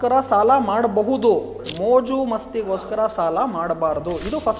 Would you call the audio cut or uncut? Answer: uncut